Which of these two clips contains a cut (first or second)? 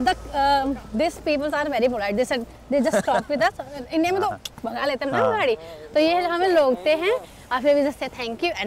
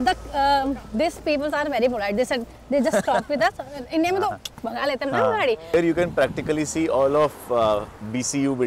second